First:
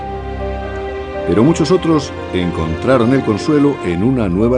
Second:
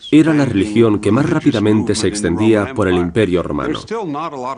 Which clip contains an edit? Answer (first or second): first